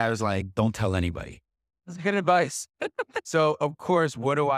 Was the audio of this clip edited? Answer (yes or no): no